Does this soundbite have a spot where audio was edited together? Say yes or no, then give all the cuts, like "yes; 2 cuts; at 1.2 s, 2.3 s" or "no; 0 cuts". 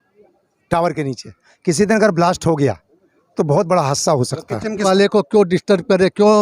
yes; 1 cut; at 4.8 s